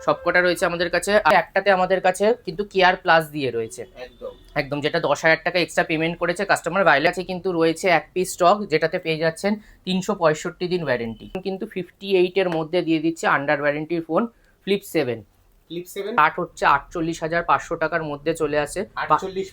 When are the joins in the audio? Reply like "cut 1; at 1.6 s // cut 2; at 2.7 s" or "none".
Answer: cut 1; at 1.3 s // cut 2; at 7.1 s // cut 3; at 11.4 s // cut 4; at 16.2 s